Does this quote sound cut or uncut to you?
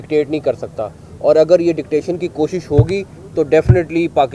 uncut